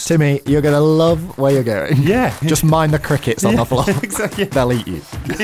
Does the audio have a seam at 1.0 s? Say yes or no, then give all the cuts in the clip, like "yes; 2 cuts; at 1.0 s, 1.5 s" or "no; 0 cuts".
no; 2 cuts; at 2.4 s, 4.5 s